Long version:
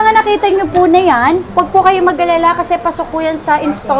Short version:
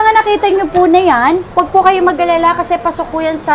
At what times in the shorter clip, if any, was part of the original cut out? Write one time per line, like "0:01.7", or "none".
none